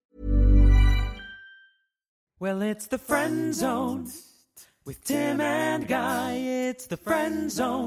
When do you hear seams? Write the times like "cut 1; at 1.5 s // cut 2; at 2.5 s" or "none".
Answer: cut 1; at 2.3 s